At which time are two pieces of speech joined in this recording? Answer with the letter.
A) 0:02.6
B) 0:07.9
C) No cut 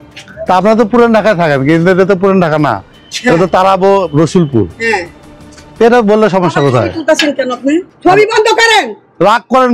B